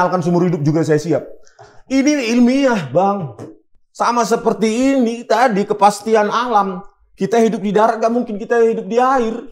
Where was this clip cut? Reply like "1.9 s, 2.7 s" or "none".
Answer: none